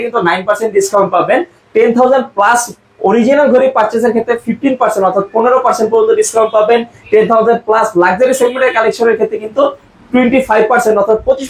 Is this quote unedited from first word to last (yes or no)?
yes